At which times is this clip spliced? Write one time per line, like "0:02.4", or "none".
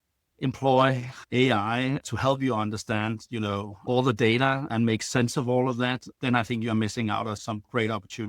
0:03.8
0:04.7
0:06.2
0:07.4